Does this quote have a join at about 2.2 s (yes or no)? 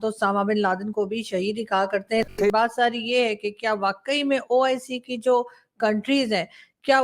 yes